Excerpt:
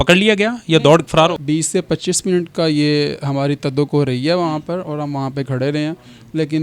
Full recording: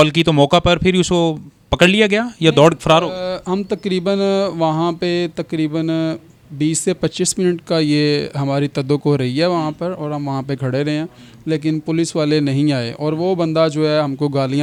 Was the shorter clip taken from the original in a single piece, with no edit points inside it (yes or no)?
no